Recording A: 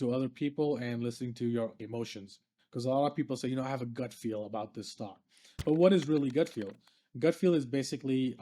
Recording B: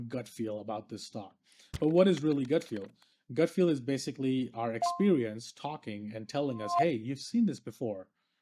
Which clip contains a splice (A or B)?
A